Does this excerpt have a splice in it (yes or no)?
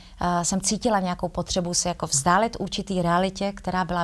no